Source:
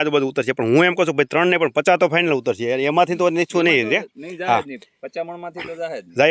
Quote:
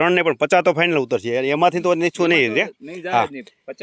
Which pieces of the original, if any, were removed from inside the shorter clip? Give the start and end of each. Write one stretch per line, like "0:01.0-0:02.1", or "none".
none